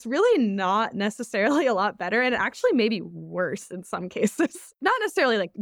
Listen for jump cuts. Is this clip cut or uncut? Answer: cut